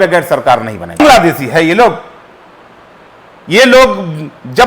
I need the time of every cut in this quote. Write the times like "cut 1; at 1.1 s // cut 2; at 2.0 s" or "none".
cut 1; at 1.0 s